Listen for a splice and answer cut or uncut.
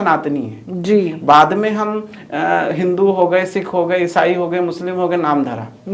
uncut